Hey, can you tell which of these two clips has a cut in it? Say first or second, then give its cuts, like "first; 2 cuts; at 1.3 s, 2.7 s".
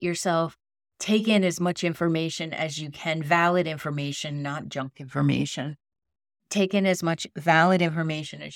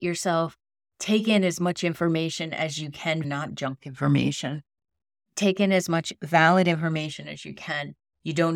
second; 1 cut; at 3.2 s